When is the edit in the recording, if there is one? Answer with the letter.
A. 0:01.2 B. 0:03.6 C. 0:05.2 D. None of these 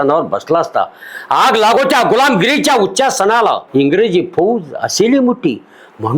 B